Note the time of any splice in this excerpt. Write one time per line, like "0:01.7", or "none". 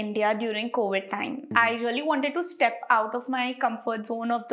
0:01.5

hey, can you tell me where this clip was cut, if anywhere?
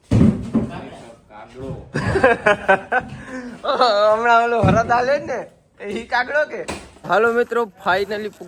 0:07.0

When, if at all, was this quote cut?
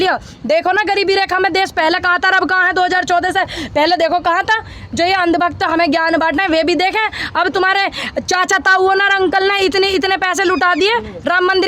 none

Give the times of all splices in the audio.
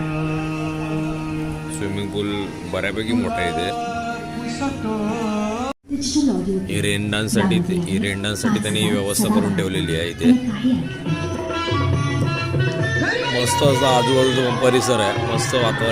0:05.8

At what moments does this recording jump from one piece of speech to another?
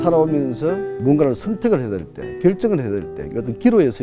0:00.9

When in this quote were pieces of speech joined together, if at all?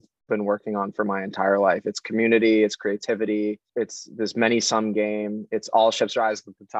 0:03.6

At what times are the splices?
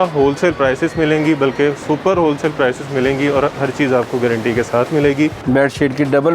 0:01.8
0:05.4

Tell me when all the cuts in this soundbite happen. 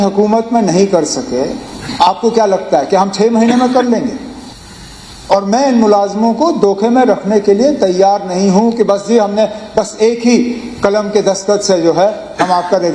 none

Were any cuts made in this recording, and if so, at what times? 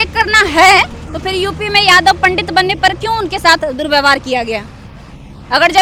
none

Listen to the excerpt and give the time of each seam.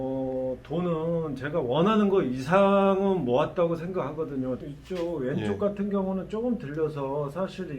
0:04.7

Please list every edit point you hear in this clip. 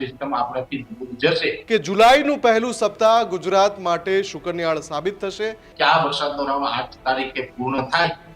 0:01.6
0:05.7

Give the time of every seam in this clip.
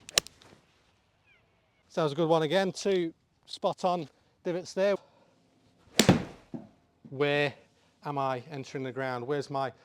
0:01.8
0:05.0

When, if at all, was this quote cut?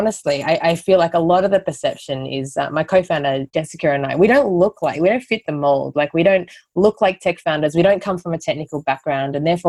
0:03.5

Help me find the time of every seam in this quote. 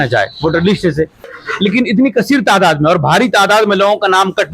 0:01.4

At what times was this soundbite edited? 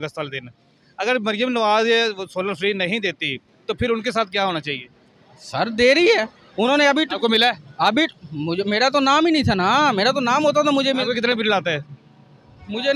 none

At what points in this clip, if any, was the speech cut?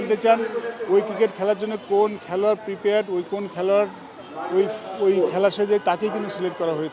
none

